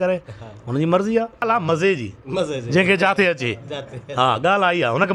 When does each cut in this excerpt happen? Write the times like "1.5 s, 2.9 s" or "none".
1.4 s